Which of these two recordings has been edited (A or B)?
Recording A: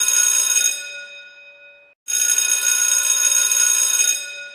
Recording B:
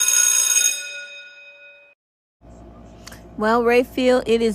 B